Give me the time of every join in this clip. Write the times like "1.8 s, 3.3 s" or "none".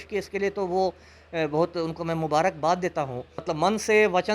3.4 s